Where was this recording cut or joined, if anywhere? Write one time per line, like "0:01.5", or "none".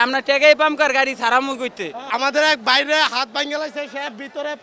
0:02.0

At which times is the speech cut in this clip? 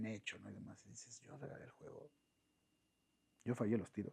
none

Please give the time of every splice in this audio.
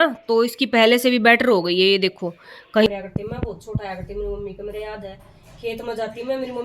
0:02.9

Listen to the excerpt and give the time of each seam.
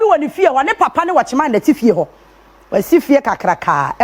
0:03.0

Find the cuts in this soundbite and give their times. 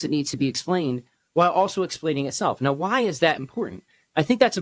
none

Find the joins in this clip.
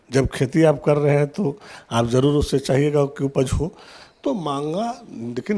none

